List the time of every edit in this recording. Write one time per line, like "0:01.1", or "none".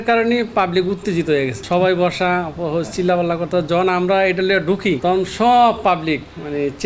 0:01.6
0:05.0